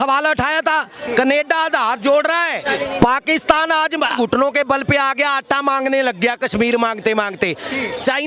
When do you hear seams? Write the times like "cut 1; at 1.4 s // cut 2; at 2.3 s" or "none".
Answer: cut 1; at 2.6 s // cut 2; at 4.1 s